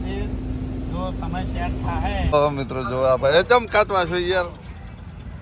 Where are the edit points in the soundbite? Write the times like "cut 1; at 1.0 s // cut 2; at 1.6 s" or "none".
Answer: cut 1; at 2.3 s